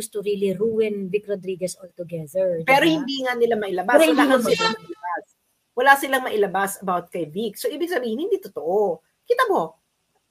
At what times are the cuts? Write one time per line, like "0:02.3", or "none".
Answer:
none